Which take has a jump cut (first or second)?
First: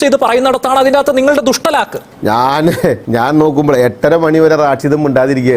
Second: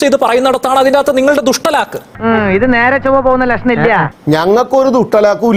first